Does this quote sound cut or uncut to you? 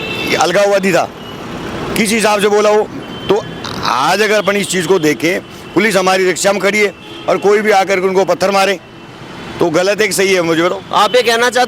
uncut